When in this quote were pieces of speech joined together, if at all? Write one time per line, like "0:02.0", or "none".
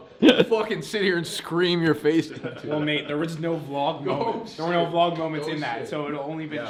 none